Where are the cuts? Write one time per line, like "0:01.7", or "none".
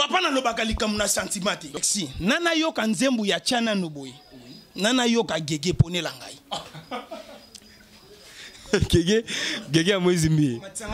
0:01.7